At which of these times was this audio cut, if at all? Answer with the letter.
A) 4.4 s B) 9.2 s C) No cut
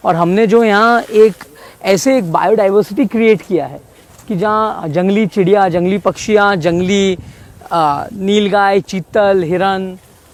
C